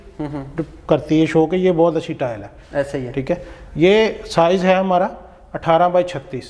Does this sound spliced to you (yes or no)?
no